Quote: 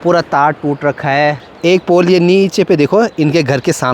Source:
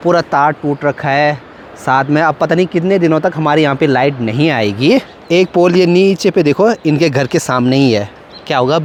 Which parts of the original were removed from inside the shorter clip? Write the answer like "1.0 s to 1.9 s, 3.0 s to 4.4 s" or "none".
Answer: 1.5 s to 5.2 s